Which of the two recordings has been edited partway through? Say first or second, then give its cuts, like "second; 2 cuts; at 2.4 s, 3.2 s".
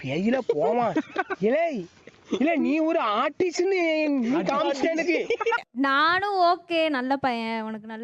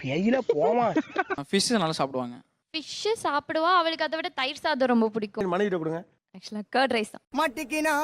second; 1 cut; at 1.3 s